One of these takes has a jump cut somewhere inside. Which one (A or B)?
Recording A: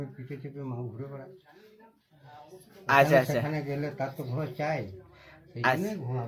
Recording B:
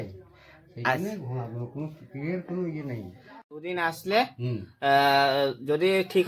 B